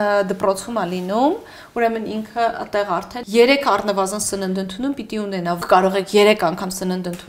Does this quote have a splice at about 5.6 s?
yes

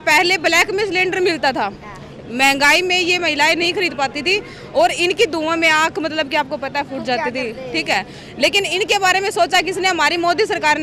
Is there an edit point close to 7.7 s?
no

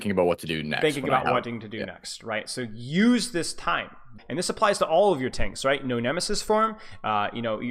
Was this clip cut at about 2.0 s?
no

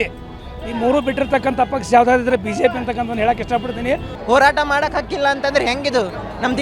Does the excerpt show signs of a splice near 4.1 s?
yes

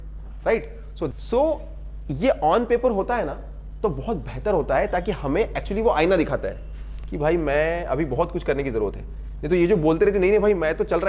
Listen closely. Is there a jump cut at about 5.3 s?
no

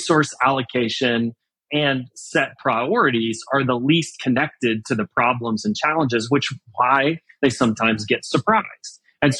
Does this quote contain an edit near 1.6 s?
yes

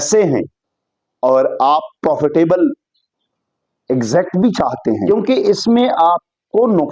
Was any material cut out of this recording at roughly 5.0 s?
yes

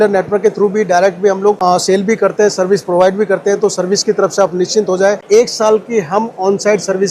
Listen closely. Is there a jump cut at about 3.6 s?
no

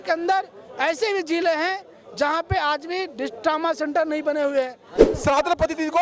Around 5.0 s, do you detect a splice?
yes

